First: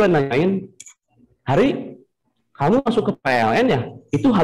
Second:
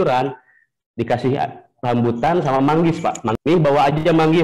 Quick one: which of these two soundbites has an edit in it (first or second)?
second